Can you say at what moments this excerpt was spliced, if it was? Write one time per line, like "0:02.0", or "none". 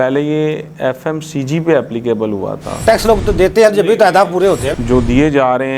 0:02.8
0:04.7